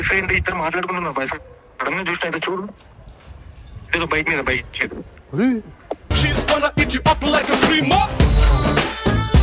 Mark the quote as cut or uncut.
uncut